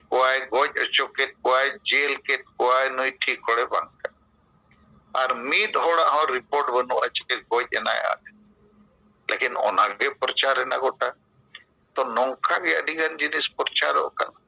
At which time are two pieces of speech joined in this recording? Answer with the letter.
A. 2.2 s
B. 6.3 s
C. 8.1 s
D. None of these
D